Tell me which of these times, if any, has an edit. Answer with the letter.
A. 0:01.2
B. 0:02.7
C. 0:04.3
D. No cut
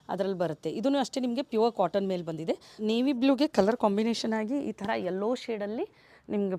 B